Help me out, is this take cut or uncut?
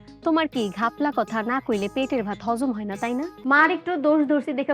cut